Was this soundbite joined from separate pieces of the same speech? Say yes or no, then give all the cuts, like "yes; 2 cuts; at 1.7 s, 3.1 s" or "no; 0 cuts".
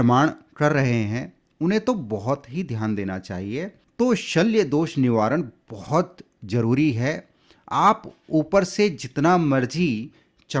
yes; 1 cut; at 3.8 s